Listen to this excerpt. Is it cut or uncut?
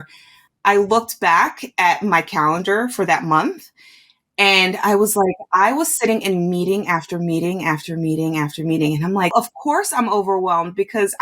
cut